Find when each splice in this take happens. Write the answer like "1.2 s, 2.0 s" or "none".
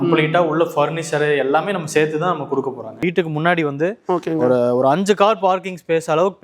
3.0 s